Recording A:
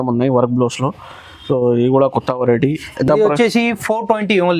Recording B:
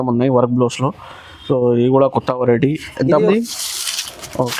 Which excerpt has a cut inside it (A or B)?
B